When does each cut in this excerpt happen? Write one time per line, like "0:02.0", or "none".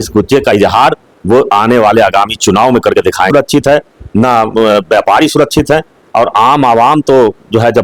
0:03.3